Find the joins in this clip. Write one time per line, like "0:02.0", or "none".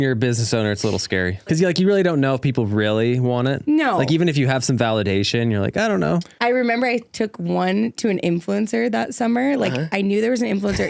0:01.5
0:06.3